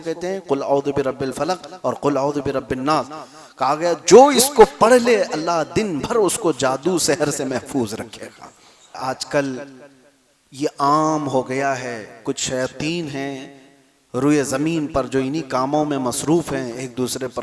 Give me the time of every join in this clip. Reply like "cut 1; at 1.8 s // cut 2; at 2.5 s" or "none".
cut 1; at 9.0 s